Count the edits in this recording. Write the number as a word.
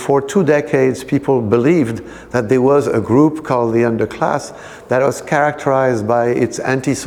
zero